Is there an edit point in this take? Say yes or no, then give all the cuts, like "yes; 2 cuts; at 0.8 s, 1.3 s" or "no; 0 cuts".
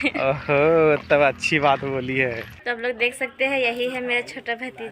yes; 1 cut; at 2.5 s